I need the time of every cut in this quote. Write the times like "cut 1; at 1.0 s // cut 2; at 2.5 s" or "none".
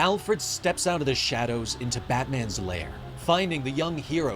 none